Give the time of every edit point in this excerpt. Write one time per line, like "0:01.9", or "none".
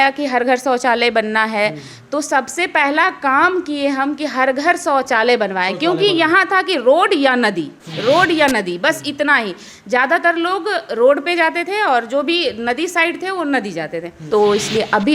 0:14.1